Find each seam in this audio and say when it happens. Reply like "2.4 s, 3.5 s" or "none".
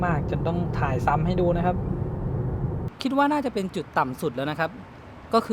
2.8 s